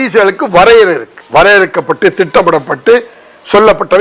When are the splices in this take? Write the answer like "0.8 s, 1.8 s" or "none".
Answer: 1.1 s